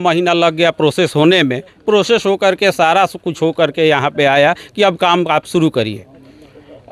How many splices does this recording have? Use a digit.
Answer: 0